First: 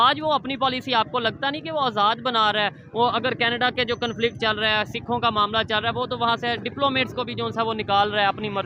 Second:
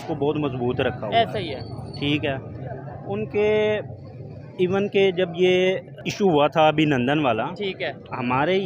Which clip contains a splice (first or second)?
second